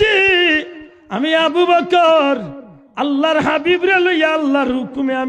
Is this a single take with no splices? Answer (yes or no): yes